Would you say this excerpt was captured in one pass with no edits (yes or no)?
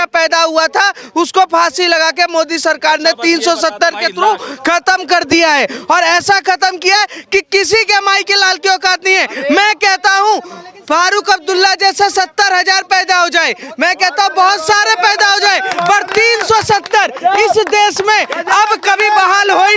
yes